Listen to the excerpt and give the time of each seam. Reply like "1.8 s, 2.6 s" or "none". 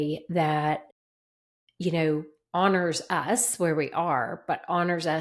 none